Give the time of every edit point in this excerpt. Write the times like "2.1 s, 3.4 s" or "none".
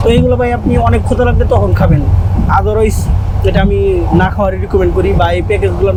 none